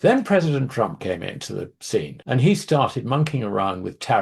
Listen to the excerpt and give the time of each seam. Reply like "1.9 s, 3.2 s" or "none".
none

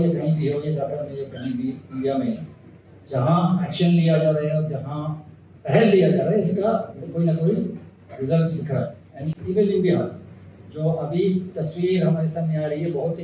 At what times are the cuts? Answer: none

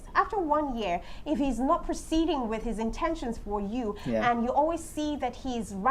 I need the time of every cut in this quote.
none

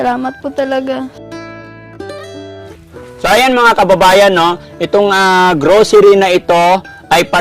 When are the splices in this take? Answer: 2.7 s

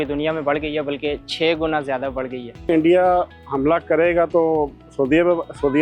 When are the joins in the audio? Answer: 2.6 s

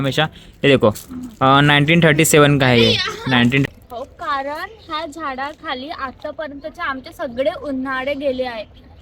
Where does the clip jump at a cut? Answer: 3.6 s

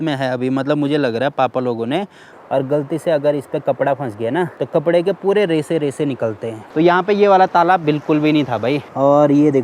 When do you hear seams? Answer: 2.3 s, 4.5 s, 6.5 s, 8.9 s

